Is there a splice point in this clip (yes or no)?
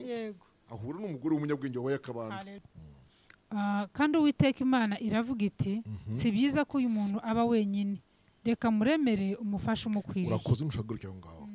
yes